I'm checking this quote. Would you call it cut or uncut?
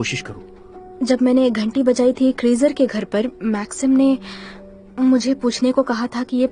uncut